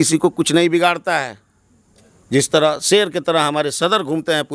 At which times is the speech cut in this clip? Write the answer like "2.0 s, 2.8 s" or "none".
none